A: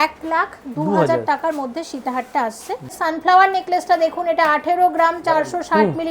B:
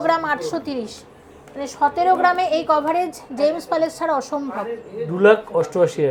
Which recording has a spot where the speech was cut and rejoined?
A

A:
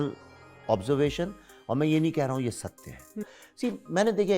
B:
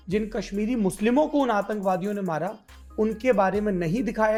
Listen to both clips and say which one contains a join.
A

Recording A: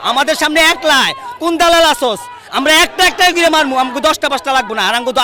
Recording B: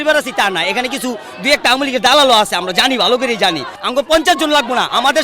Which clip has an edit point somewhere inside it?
B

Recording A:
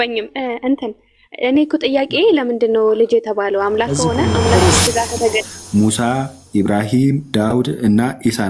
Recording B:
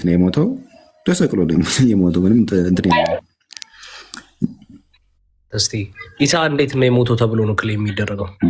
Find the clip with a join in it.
A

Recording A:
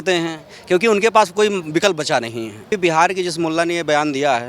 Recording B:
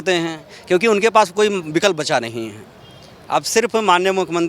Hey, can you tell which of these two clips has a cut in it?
A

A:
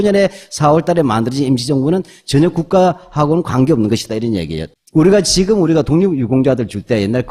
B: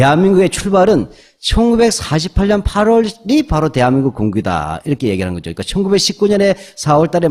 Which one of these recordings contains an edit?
B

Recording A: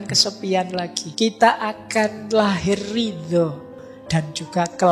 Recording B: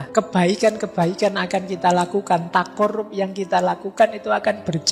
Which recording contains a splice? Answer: A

